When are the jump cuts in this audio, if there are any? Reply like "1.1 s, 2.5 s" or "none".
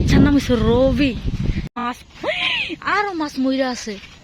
1.8 s

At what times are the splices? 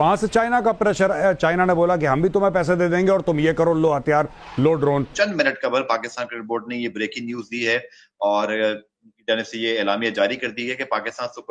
5.1 s

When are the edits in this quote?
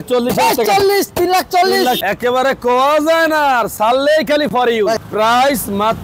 2.0 s, 5.0 s

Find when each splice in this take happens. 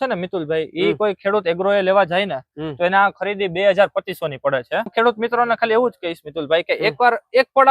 4.9 s

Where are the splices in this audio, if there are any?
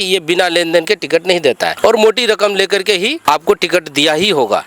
1.7 s, 3.2 s

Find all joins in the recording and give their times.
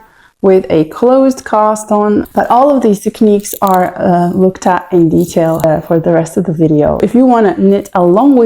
2.3 s, 7.0 s

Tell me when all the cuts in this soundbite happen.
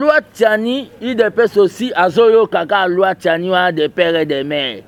none

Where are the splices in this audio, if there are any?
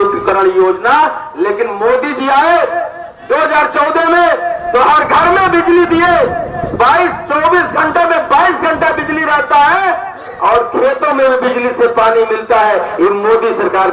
none

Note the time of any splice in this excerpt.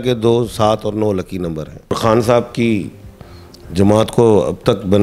1.9 s

